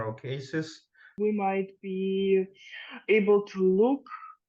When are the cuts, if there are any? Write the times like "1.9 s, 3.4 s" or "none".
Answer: 1.1 s